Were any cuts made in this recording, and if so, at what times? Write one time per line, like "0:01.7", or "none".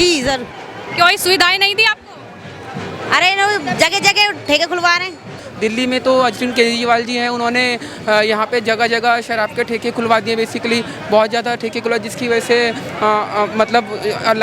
0:05.4